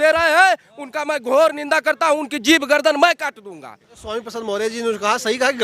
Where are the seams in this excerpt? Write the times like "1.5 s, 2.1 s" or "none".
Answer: 3.9 s